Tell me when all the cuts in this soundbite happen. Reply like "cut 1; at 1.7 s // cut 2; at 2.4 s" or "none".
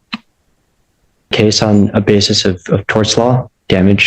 cut 1; at 1.3 s